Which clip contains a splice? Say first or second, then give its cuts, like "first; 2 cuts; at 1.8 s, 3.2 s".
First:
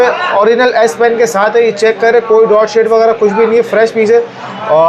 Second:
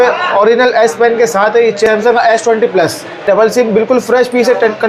second; 2 cuts; at 1.9 s, 3.2 s